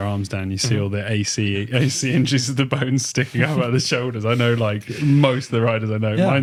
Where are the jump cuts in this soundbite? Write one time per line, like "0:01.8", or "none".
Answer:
none